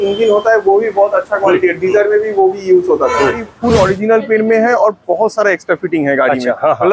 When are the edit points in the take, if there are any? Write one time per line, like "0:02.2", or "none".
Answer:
0:03.5